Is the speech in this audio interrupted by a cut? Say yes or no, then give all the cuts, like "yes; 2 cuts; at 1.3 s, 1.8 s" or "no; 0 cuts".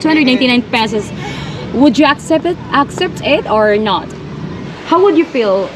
yes; 1 cut; at 4.7 s